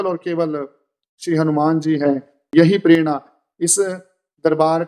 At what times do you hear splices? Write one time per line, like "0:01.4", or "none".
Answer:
0:02.5